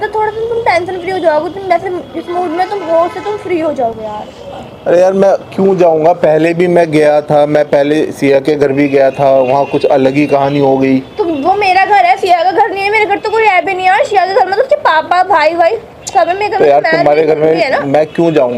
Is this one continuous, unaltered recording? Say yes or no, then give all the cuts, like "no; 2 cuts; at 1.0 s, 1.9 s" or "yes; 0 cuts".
yes; 0 cuts